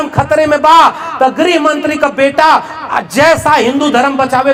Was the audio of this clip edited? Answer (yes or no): no